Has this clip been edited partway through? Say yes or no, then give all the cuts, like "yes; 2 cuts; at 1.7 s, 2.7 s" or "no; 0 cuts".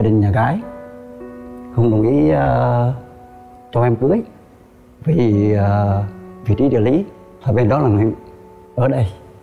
no; 0 cuts